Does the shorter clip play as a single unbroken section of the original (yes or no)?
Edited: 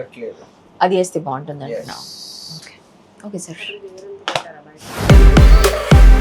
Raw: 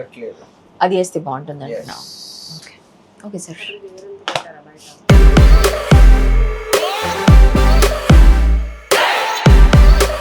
yes